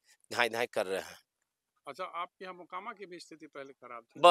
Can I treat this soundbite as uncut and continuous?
yes; 0 cuts

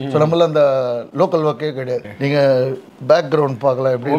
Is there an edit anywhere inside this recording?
yes; 2 cuts; at 1.1 s, 2.1 s

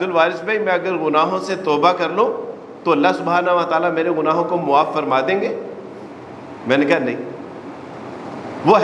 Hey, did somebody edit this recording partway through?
no; 0 cuts

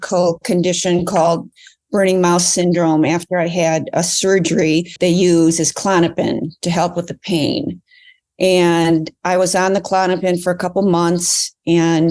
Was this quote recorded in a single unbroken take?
no; 1 cut; at 4.9 s

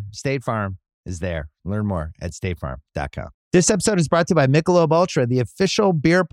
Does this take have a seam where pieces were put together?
yes; 1 cut; at 3.4 s

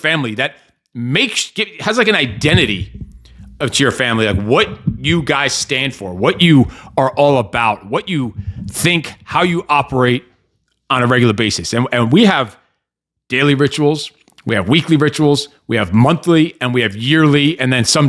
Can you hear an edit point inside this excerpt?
no; 0 cuts

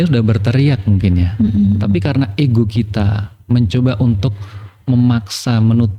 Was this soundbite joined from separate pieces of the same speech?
no; 0 cuts

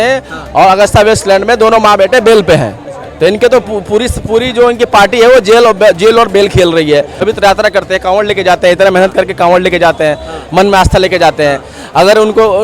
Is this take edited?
yes; 1 cut; at 7.1 s

